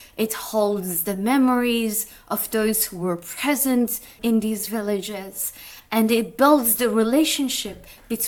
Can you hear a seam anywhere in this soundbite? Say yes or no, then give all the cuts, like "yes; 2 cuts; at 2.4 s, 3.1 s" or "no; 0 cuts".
no; 0 cuts